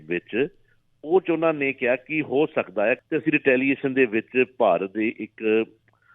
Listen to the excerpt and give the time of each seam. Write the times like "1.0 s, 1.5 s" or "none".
3.0 s